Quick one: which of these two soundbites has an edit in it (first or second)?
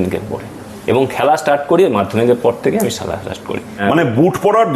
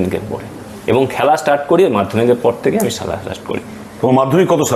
first